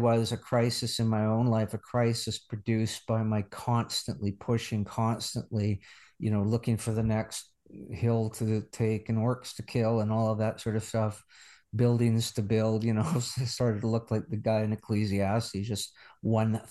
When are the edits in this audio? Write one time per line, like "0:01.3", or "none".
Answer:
none